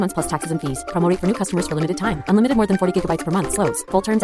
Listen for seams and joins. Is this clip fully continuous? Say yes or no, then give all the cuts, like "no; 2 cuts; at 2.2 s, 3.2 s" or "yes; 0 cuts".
yes; 0 cuts